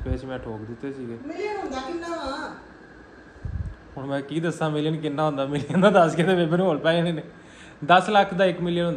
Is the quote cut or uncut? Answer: uncut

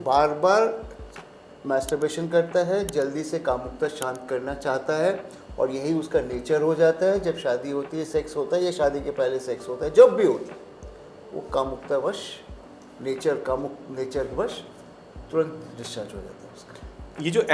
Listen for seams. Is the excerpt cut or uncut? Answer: uncut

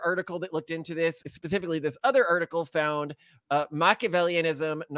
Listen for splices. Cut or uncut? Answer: uncut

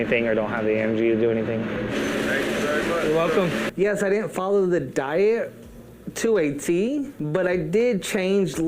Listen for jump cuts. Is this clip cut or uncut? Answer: cut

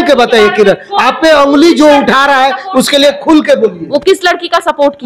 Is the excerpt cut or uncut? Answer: uncut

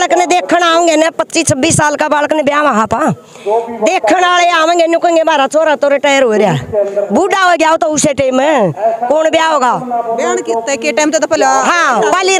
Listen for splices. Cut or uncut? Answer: uncut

